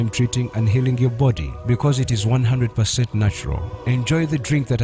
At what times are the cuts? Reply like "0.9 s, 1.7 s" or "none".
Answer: none